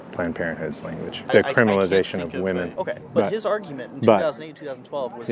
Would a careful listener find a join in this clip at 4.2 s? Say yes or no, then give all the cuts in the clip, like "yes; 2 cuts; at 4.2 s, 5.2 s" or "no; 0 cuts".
no; 2 cuts; at 1.3 s, 2.7 s